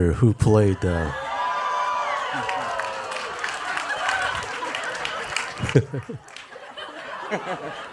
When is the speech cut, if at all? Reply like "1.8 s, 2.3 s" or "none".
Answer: none